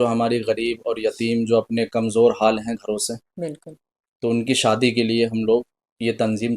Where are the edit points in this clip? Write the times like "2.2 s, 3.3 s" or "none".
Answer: none